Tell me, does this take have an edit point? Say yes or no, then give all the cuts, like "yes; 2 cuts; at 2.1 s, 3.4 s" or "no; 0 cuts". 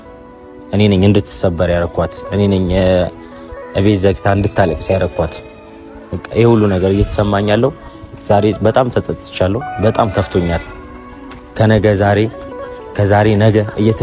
no; 0 cuts